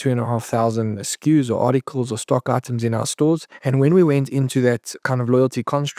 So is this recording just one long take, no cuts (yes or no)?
no